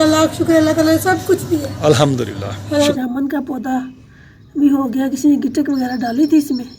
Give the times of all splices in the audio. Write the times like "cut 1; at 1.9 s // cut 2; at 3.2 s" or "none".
cut 1; at 3.0 s

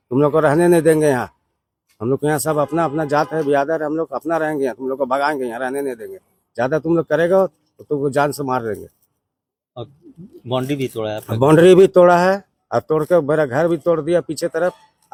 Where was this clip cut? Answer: none

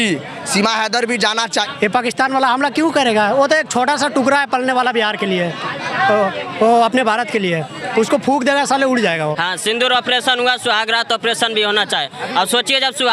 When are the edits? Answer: cut 1; at 1.7 s // cut 2; at 9.4 s

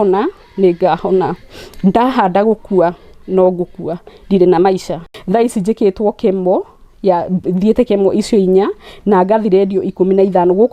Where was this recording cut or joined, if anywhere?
cut 1; at 5.1 s

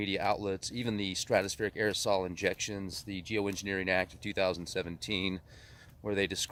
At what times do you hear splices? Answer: none

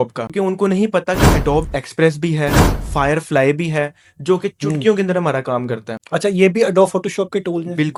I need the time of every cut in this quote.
none

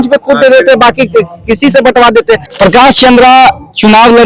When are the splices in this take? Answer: cut 1; at 2.5 s

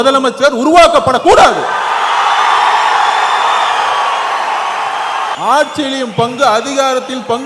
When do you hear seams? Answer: cut 1; at 5.3 s

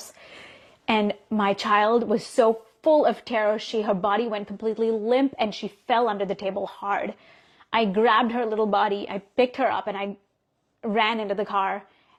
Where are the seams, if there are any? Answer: none

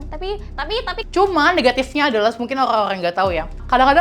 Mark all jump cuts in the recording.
cut 1; at 1.0 s

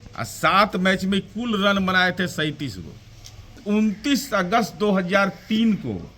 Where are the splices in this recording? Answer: cut 1; at 3.6 s

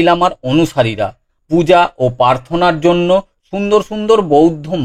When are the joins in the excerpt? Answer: cut 1; at 1.3 s

